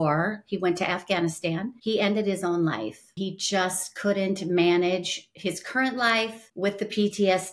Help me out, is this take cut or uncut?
cut